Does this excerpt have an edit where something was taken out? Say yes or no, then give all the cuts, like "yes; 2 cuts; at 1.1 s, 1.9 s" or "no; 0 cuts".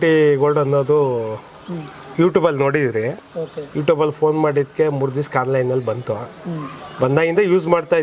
no; 0 cuts